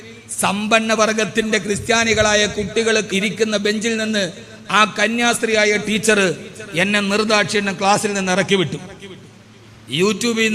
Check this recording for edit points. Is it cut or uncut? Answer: cut